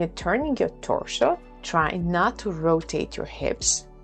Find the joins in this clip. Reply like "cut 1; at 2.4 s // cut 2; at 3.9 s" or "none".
cut 1; at 1.5 s